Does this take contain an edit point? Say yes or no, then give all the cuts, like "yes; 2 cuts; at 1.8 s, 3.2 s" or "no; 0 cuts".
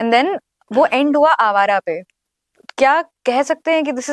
no; 0 cuts